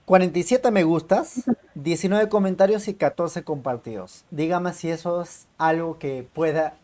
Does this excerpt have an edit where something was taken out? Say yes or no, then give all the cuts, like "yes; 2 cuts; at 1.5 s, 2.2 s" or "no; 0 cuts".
no; 0 cuts